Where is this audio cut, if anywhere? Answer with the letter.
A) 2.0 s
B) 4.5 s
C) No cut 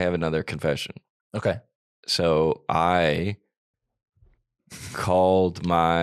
C